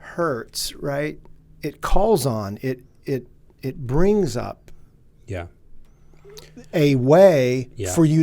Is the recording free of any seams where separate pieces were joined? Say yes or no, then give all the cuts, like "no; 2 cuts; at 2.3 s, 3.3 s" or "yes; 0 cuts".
no; 1 cut; at 1.3 s